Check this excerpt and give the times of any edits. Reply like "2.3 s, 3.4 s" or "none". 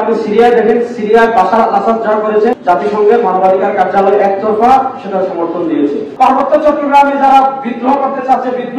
2.6 s, 6.1 s